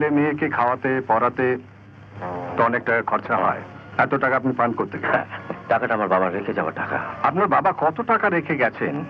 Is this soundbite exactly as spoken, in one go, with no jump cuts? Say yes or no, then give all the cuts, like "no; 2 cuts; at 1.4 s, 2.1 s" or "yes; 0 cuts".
no; 3 cuts; at 3.8 s, 5.5 s, 7.1 s